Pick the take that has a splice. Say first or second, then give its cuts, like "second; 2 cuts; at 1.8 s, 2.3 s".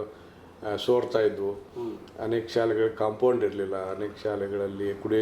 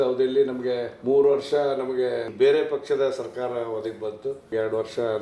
second; 3 cuts; at 0.9 s, 2.3 s, 4.5 s